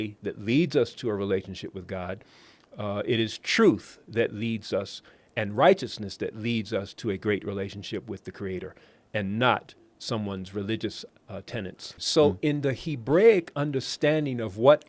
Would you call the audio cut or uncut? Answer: cut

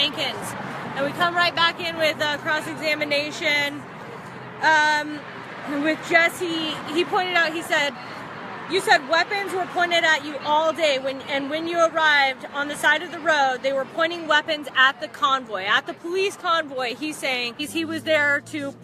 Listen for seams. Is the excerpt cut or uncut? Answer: uncut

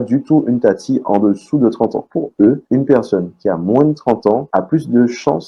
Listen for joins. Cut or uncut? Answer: cut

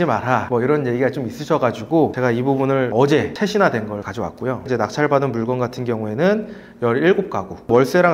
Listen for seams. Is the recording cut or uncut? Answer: uncut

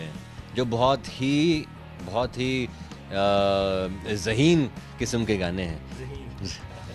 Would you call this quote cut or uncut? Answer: uncut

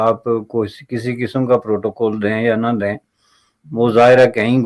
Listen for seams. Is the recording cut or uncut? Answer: uncut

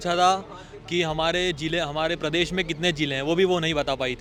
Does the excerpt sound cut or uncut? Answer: uncut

